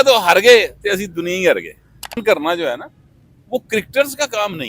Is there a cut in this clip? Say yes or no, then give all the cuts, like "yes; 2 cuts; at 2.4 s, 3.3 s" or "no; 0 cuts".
yes; 1 cut; at 2.2 s